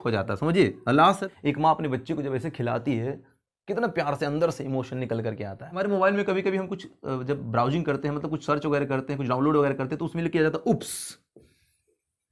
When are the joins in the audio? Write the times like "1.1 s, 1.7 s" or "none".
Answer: 1.4 s, 5.8 s